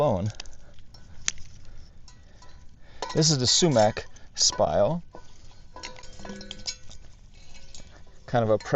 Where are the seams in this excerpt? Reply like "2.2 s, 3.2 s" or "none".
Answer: 1.4 s